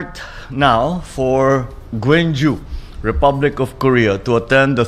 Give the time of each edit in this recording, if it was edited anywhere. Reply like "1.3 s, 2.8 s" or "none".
1.6 s